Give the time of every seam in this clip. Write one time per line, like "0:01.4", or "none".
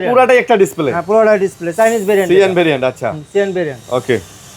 none